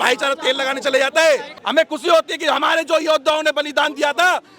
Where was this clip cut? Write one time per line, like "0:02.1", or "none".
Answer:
0:01.6